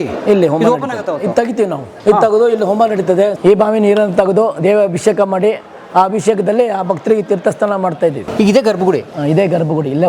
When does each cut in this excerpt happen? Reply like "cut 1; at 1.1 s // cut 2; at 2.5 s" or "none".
cut 1; at 1.9 s // cut 2; at 3.4 s // cut 3; at 8.2 s